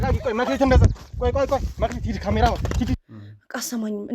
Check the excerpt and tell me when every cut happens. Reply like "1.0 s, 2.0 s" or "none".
3.0 s